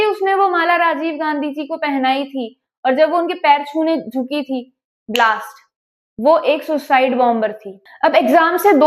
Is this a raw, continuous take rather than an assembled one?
no; 1 cut; at 7.9 s

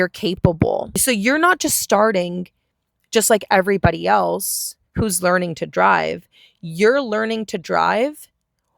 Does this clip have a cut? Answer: yes; 1 cut; at 1.0 s

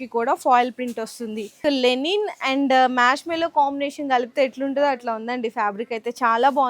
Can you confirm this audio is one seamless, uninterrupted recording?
no; 1 cut; at 1.6 s

